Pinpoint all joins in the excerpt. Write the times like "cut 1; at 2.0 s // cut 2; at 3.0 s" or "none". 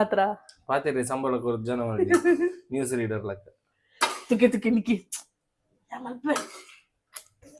none